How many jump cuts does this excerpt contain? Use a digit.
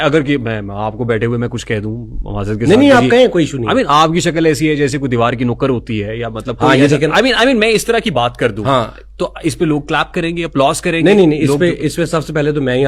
0